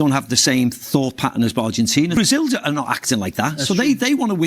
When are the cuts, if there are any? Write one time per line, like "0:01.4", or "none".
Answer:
0:02.2